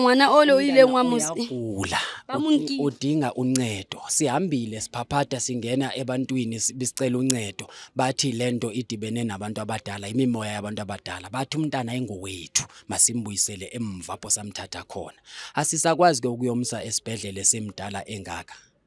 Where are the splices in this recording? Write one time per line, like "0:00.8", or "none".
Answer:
none